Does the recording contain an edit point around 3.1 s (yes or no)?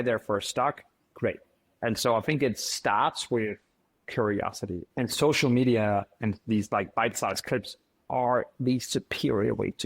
no